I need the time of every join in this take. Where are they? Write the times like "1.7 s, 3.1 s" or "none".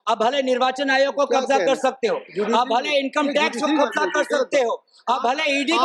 none